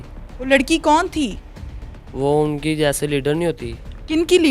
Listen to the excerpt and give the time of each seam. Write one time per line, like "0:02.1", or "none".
none